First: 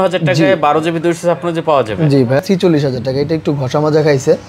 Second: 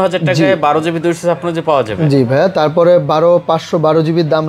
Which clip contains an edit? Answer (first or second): first